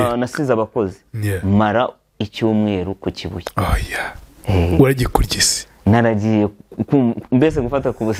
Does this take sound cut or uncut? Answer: uncut